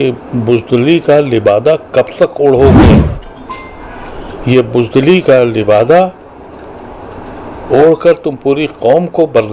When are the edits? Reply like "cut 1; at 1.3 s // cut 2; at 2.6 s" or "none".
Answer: none